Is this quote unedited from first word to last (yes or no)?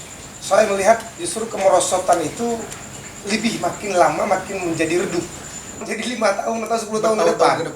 no